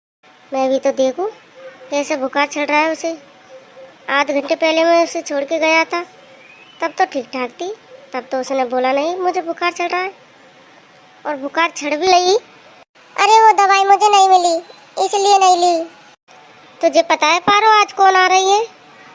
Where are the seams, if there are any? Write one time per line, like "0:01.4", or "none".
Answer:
0:12.1